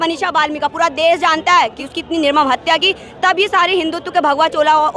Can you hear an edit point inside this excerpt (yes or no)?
no